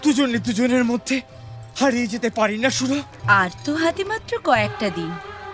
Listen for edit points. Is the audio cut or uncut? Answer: cut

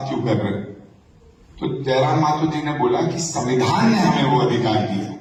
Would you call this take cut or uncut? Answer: uncut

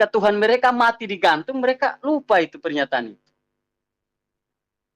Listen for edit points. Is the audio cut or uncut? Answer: uncut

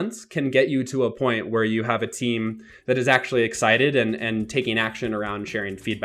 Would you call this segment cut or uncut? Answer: uncut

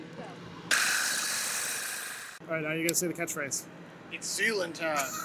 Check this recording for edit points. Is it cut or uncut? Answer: cut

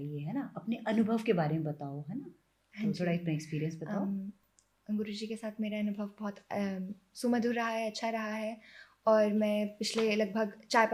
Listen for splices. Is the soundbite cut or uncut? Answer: uncut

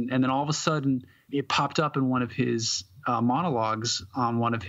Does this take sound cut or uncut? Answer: cut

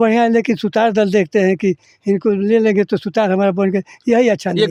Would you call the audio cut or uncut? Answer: uncut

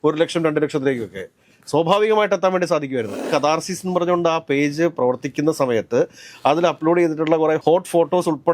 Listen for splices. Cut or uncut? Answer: cut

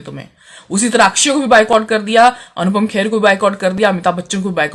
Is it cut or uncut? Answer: uncut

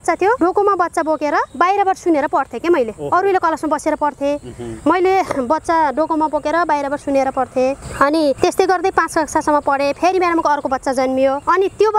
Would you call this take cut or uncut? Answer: uncut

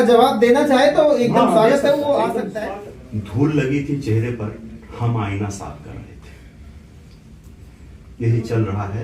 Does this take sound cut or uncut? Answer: cut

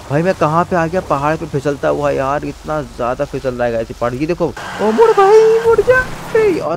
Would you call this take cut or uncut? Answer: cut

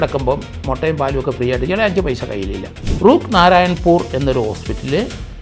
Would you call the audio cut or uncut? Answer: cut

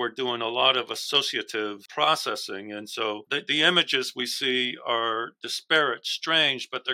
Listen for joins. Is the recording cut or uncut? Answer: cut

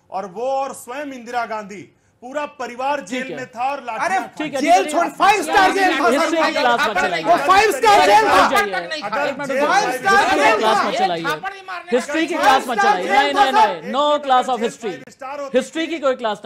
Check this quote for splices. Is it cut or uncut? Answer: uncut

